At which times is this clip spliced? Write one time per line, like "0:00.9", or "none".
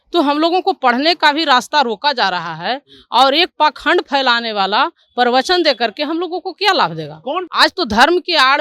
0:07.4